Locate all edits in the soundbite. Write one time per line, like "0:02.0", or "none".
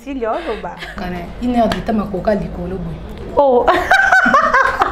0:01.0